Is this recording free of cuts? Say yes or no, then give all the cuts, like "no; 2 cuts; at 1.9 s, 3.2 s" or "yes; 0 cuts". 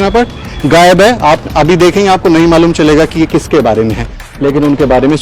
no; 1 cut; at 4.3 s